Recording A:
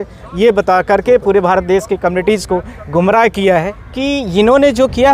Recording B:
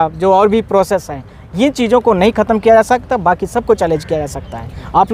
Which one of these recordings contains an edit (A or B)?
A